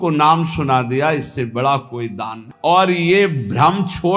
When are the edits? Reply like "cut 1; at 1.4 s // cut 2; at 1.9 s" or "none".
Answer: cut 1; at 2.4 s